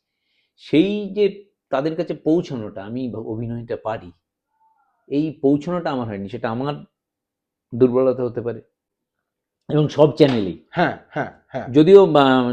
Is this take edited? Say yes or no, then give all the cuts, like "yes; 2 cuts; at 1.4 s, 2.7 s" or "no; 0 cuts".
yes; 1 cut; at 8.8 s